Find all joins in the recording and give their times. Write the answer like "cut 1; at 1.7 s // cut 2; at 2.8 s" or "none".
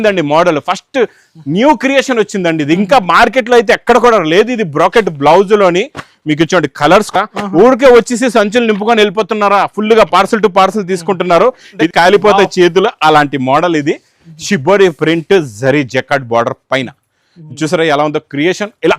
cut 1; at 11.9 s